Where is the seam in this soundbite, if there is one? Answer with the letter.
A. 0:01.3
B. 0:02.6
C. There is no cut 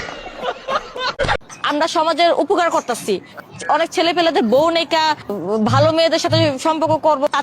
A